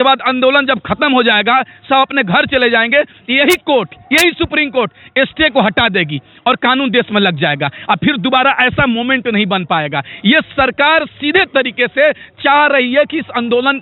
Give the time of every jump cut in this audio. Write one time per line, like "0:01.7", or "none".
none